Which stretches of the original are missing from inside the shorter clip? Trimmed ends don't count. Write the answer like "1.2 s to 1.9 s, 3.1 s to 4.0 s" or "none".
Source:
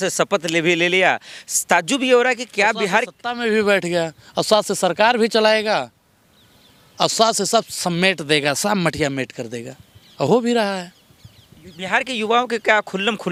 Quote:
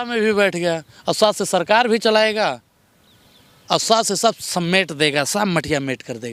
none